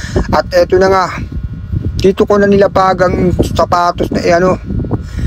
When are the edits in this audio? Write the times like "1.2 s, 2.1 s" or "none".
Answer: none